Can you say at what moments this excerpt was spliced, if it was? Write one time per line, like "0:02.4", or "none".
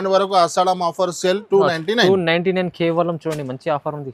none